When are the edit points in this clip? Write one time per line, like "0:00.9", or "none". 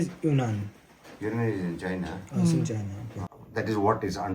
0:03.2